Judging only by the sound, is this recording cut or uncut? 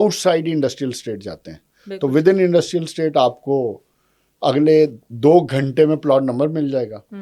uncut